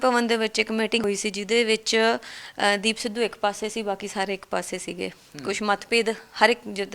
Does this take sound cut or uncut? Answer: cut